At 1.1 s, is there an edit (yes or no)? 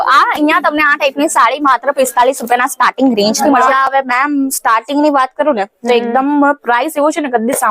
no